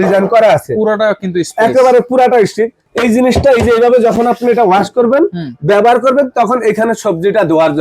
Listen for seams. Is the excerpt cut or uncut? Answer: cut